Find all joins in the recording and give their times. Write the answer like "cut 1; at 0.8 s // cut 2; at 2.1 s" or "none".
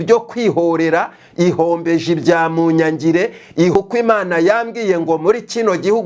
cut 1; at 3.8 s